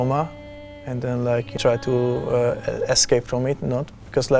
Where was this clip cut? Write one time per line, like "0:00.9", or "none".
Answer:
0:01.5